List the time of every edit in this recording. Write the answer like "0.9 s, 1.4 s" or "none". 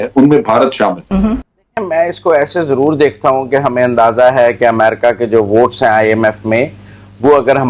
none